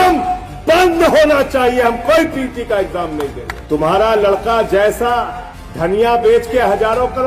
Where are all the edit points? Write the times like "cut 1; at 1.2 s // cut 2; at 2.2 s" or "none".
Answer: cut 1; at 3.5 s